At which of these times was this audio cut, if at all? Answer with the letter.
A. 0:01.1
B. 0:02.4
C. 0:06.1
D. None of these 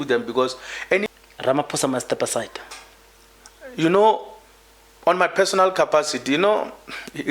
A